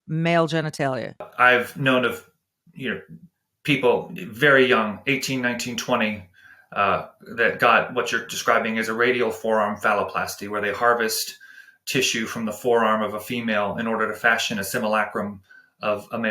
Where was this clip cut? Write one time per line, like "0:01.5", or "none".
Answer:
0:01.3